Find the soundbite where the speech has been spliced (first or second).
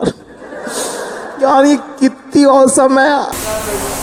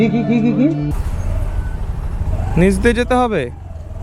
second